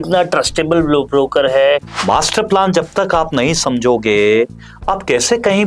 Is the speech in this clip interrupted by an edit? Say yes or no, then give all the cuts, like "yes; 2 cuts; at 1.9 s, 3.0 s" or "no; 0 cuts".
yes; 1 cut; at 1.9 s